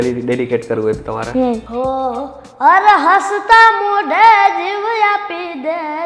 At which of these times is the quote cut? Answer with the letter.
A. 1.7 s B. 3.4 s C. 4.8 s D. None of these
A